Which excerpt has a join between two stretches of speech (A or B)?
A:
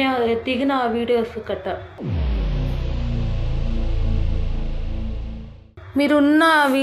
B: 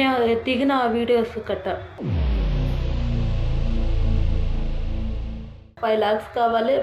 B